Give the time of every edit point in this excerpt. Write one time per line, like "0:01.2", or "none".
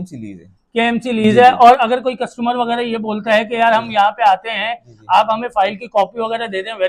none